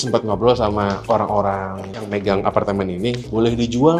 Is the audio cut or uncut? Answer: cut